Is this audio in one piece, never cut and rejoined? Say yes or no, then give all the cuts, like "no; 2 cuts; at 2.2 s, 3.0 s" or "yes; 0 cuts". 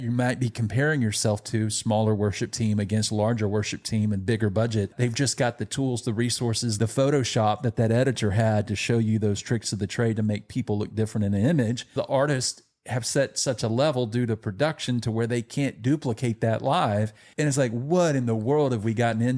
no; 4 cuts; at 4.9 s, 6.7 s, 11.9 s, 17.3 s